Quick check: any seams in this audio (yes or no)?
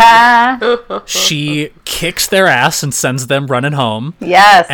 no